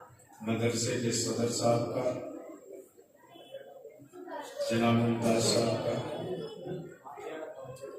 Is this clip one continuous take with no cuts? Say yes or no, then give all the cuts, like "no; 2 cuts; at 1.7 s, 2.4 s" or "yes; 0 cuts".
yes; 0 cuts